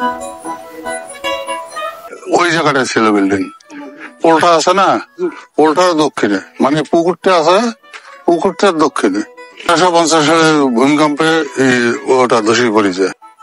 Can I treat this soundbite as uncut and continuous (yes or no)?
no